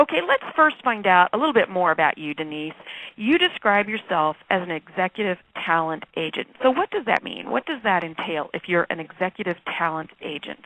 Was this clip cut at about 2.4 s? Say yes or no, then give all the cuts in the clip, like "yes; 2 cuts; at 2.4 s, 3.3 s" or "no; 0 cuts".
no; 1 cut; at 7.0 s